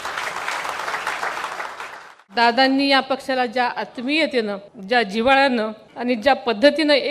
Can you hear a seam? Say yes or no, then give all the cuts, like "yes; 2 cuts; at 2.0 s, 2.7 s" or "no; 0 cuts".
yes; 3 cuts; at 2.0 s, 4.7 s, 5.8 s